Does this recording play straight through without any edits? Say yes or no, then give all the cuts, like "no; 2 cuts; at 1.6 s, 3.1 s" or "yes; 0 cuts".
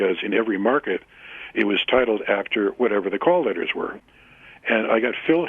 no; 1 cut; at 3.9 s